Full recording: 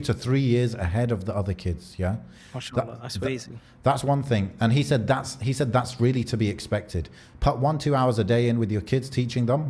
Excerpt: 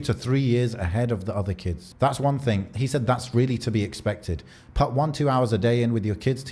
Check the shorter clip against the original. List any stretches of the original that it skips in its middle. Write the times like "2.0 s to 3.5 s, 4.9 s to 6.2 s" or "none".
1.8 s to 3.7 s, 4.5 s to 5.3 s